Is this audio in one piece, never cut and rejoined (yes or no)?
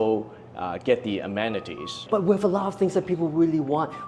no